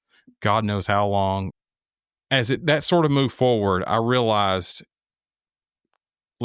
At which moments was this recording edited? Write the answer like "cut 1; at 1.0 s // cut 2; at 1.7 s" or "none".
cut 1; at 1.5 s